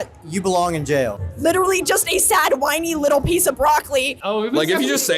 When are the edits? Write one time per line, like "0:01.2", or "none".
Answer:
0:01.2
0:04.2

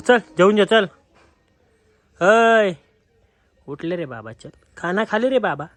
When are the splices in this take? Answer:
none

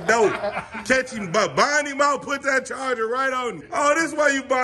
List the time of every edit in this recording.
0:03.6

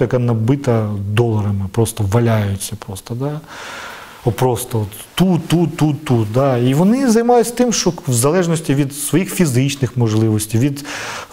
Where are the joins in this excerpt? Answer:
none

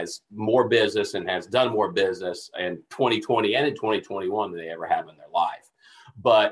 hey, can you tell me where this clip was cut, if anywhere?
none

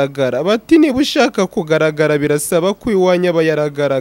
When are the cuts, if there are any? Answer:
none

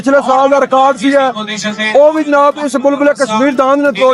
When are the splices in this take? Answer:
none

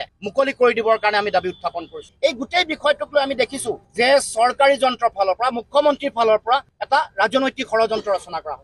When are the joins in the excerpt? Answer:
0:02.1

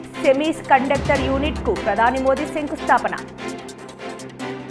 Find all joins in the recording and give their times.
none

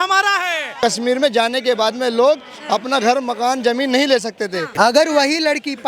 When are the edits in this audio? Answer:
0:00.8
0:04.7

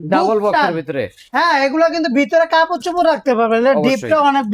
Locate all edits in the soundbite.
none

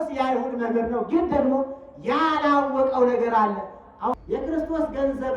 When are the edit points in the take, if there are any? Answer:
0:04.1

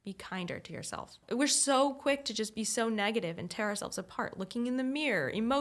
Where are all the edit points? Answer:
0:01.2

